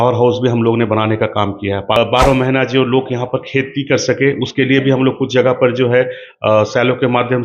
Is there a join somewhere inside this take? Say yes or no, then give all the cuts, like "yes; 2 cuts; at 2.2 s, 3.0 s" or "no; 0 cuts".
yes; 1 cut; at 2.0 s